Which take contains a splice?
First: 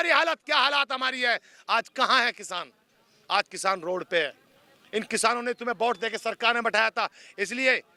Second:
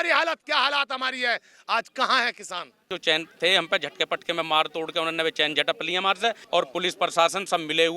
second; 2 cuts; at 2.9 s, 6.4 s

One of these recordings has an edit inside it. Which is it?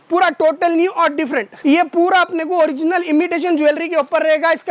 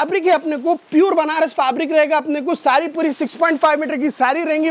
first; 1 cut; at 1.5 s

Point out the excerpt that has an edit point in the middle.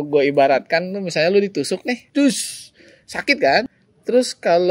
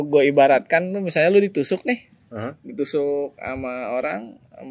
first; 2 cuts; at 2.0 s, 3.8 s

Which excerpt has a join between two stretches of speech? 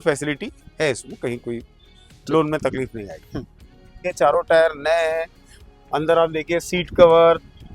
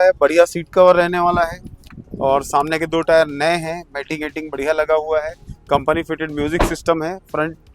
first; 1 cut; at 4.1 s

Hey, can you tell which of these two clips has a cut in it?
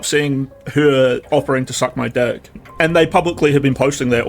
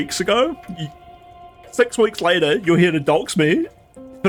first; 1 cut; at 2.6 s

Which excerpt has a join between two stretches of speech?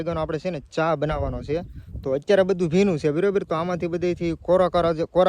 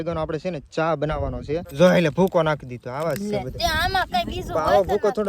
second; 1 cut; at 1.7 s

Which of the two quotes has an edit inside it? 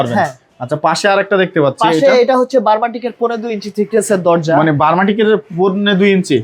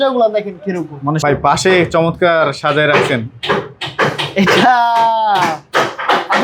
second; 1 cut; at 1.2 s

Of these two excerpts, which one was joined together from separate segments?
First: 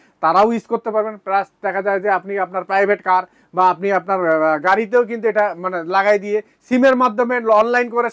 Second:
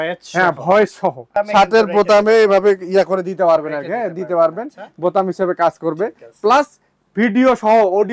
second; 1 cut; at 1.2 s

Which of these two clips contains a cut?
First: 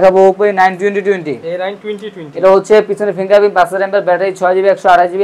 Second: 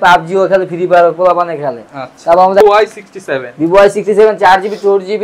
second; 1 cut; at 2.6 s

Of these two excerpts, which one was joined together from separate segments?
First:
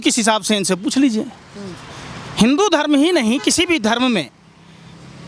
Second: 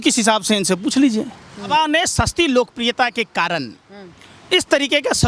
second; 1 cut; at 1.7 s

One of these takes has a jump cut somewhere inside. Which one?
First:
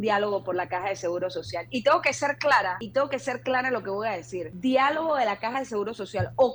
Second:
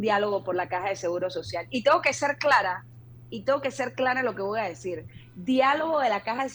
first; 2 cuts; at 2.8 s, 4.4 s

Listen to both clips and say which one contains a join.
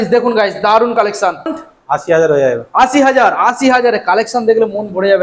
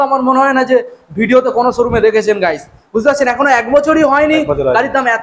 first; 1 cut; at 1.6 s

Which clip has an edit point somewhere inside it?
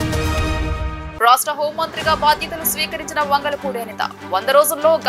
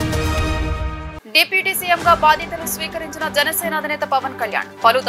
first; 1 cut; at 1.0 s

